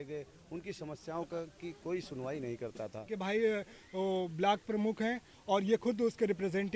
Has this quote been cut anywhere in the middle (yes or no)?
yes